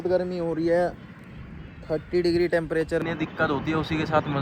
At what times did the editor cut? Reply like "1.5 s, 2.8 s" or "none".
3.0 s